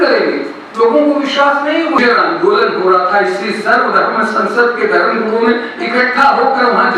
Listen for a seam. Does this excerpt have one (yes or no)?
yes